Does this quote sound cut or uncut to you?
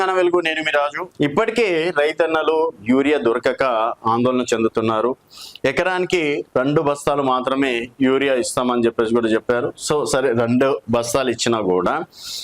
cut